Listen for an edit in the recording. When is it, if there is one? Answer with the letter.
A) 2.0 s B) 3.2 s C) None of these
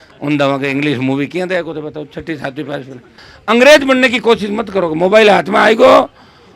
B